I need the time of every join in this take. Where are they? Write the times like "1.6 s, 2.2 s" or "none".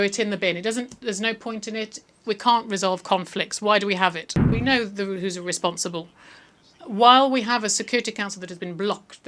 4.4 s